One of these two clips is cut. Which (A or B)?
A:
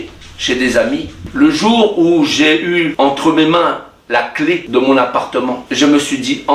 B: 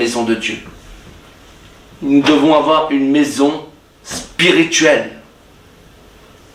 A